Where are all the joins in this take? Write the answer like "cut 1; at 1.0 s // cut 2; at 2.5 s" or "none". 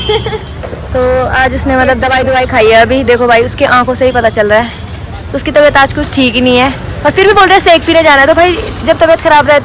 none